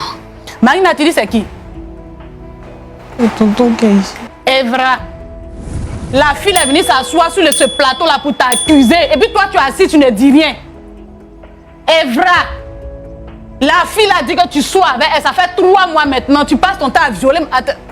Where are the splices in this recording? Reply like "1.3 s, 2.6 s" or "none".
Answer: 1.7 s, 3.1 s